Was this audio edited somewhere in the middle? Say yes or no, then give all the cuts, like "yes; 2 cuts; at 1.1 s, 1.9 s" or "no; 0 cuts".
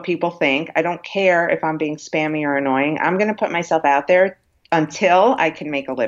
no; 0 cuts